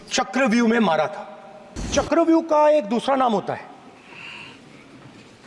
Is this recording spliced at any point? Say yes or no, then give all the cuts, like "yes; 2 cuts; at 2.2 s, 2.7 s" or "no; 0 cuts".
yes; 1 cut; at 1.9 s